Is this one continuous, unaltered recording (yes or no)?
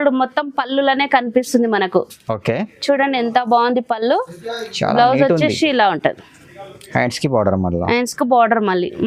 yes